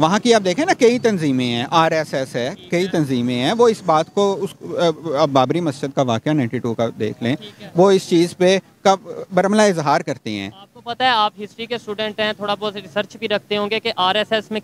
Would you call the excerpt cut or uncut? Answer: uncut